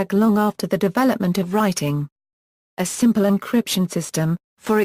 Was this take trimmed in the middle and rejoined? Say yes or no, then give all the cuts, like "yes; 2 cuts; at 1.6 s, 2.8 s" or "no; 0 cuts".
yes; 1 cut; at 2.6 s